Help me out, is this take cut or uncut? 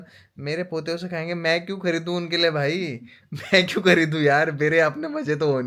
uncut